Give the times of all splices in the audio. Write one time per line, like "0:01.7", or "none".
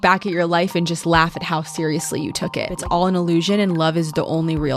0:02.8